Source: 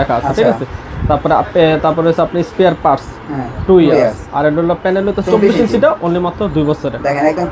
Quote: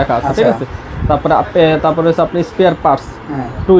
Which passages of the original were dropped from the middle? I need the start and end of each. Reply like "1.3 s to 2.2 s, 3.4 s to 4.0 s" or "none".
none